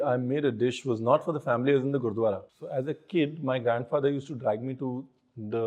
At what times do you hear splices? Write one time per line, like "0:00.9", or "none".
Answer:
0:02.5